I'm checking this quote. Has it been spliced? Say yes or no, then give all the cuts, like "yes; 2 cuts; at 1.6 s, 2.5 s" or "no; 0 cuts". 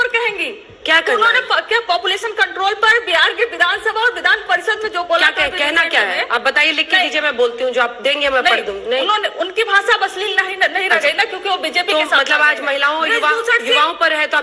no; 0 cuts